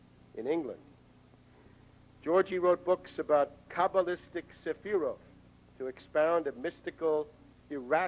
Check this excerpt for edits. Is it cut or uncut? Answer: cut